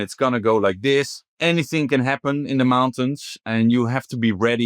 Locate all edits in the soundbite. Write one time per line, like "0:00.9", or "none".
0:01.2